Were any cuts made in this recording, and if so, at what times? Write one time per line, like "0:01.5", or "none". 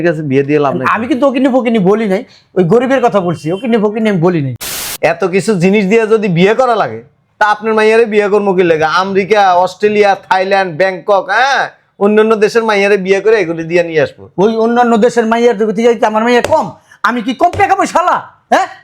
0:04.9